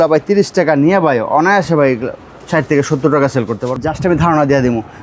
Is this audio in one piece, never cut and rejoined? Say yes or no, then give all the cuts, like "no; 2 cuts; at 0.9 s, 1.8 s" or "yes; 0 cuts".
no; 1 cut; at 3.8 s